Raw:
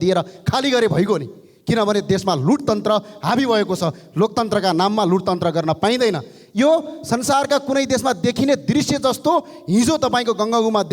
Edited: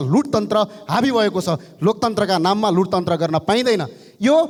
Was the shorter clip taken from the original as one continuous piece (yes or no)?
yes